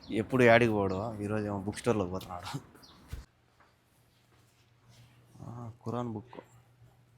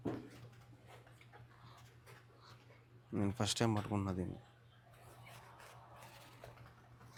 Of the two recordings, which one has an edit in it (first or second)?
first